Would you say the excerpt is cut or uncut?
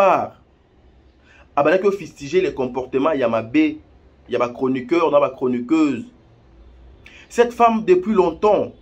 uncut